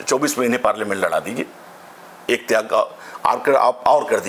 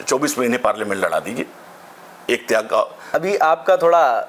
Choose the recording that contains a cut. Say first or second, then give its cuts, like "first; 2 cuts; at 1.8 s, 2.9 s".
second; 1 cut; at 3.0 s